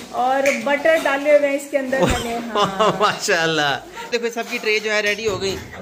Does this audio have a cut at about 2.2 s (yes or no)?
no